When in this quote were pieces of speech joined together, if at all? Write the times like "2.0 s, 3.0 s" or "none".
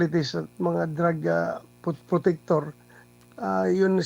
none